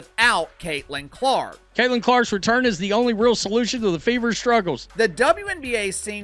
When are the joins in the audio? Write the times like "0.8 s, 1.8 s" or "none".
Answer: none